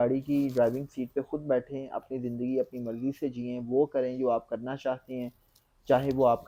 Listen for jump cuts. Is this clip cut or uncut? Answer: uncut